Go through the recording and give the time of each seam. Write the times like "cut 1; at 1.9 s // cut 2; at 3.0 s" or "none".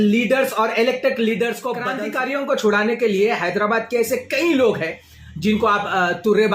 cut 1; at 1.9 s